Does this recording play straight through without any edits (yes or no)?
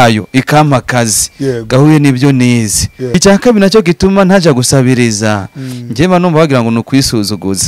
no